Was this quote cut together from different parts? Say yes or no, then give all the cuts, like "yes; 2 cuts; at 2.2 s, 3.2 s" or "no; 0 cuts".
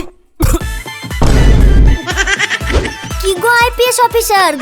no; 0 cuts